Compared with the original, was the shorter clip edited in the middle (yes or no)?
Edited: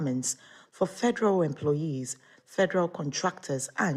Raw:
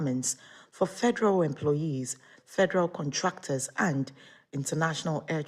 no